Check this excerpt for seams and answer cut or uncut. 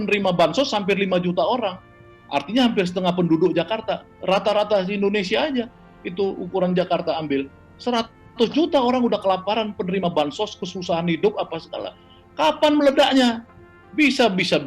uncut